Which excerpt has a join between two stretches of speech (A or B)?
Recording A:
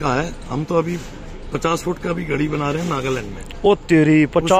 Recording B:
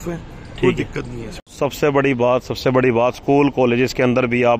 B